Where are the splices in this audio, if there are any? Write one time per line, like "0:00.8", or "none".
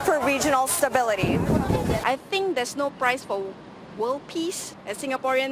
none